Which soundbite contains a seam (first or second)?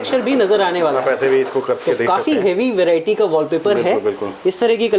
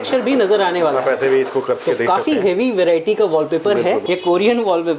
second